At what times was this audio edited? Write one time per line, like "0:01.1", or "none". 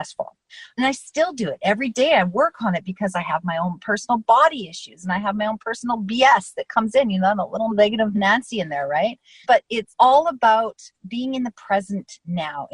0:07.7